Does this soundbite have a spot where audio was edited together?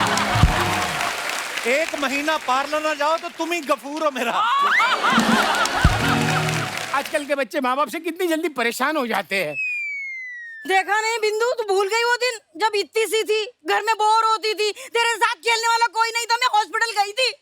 yes; 1 cut; at 6.8 s

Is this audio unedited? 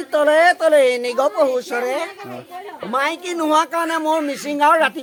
yes; 0 cuts

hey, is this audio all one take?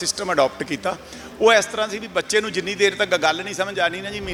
yes; 0 cuts

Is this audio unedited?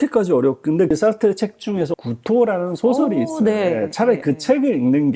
no; 1 cut; at 1.9 s

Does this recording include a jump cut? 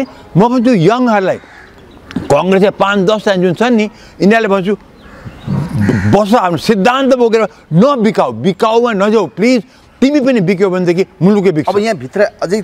no; 0 cuts

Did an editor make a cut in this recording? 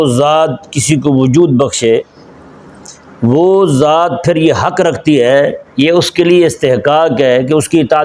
no; 0 cuts

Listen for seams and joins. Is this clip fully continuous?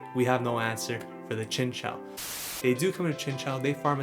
no; 1 cut; at 2.3 s

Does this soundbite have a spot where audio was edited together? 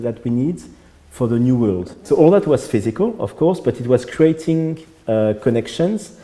yes; 1 cut; at 2.0 s

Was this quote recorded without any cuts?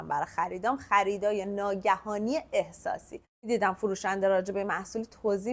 no; 1 cut; at 3.3 s

